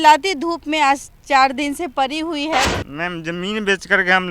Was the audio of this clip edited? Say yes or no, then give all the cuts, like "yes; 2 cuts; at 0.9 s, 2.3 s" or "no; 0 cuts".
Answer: yes; 1 cut; at 2.7 s